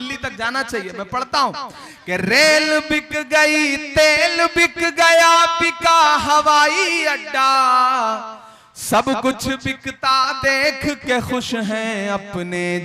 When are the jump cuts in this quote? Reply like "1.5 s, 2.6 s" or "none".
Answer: none